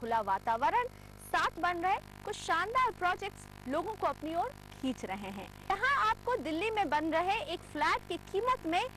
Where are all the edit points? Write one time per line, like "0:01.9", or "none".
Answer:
0:01.6
0:05.7

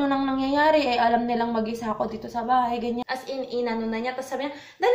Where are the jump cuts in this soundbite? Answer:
0:03.0

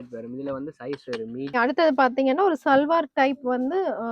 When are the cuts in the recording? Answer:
0:01.5

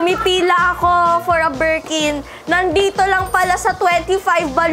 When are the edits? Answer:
none

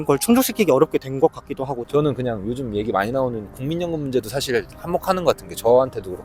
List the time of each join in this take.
0:01.7

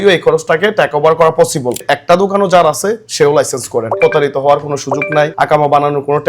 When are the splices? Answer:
0:01.8
0:03.9

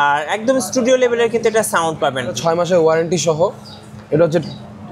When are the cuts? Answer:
0:02.3

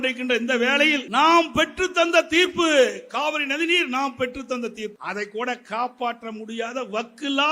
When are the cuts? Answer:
0:01.0
0:05.0

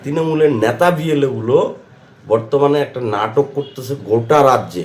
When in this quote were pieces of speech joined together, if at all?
none

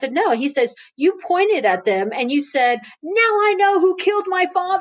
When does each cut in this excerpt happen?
none

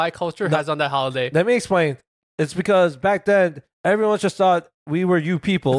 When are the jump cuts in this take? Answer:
0:02.1

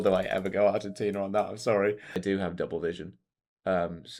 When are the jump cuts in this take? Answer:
0:02.2

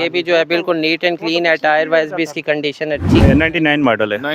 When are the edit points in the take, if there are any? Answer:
0:03.2

